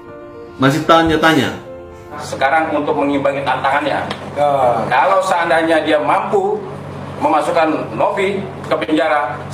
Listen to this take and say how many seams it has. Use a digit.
1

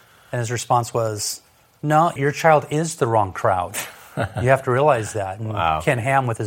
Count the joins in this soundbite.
1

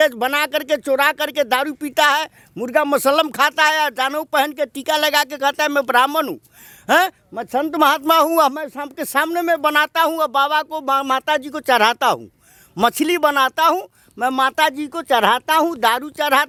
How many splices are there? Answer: 0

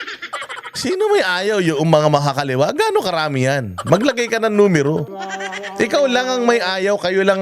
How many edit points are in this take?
1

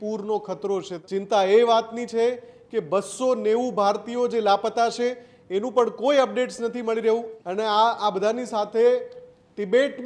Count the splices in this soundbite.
2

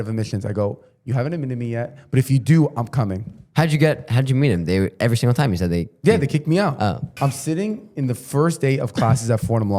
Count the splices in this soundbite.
1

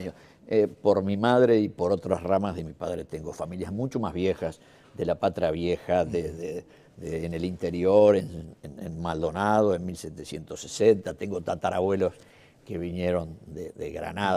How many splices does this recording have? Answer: 1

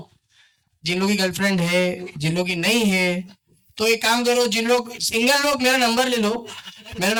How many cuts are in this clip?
0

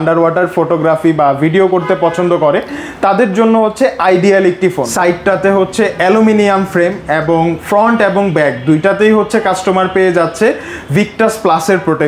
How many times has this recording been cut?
1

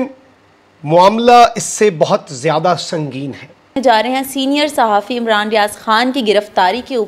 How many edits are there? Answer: 1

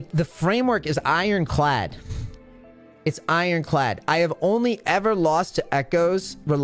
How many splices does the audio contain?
0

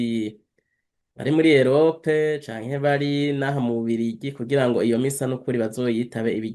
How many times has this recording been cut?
0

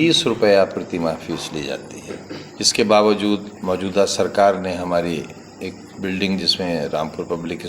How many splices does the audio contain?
2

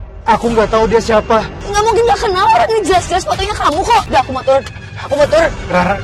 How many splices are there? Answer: 0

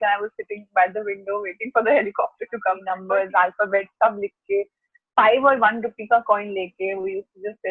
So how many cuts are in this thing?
1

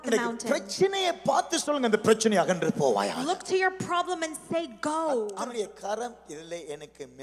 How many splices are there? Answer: 1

